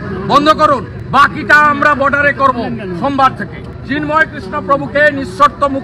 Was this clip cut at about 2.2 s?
no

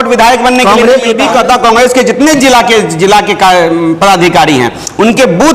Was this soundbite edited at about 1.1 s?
yes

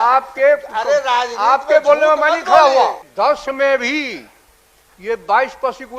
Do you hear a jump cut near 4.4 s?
no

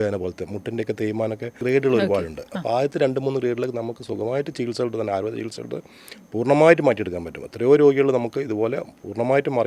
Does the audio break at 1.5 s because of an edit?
yes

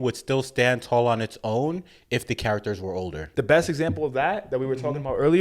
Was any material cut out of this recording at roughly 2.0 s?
no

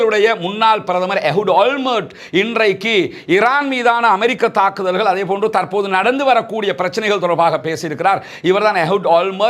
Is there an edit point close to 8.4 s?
no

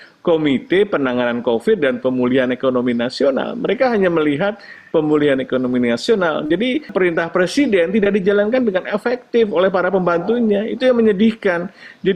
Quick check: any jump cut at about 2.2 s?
no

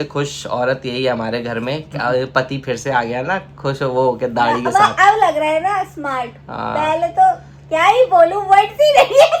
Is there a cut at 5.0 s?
no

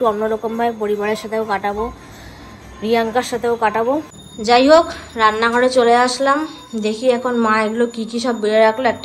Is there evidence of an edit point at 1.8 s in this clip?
no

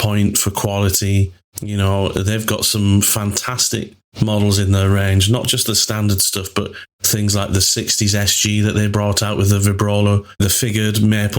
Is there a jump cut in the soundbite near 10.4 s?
yes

